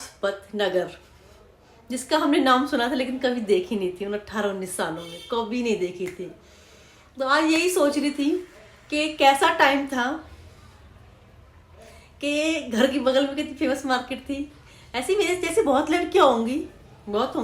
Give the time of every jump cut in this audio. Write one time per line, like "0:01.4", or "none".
none